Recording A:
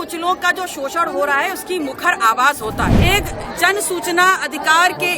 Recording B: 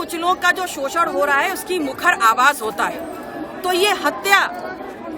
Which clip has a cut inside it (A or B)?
A